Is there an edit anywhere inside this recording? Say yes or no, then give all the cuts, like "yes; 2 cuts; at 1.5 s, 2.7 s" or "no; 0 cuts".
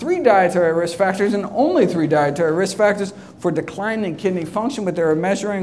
no; 0 cuts